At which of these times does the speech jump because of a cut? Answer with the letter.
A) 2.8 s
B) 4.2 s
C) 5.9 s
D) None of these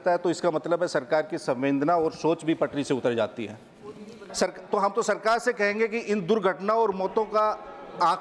B